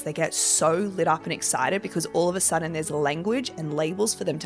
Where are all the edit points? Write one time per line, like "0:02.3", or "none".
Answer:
none